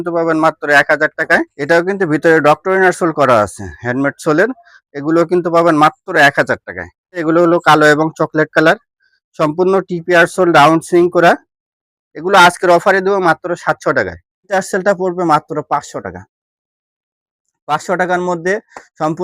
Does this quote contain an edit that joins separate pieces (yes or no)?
yes